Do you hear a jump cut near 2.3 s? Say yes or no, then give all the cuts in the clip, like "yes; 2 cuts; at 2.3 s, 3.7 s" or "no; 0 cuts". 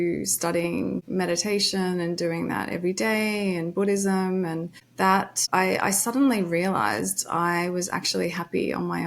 no; 2 cuts; at 1.0 s, 5.2 s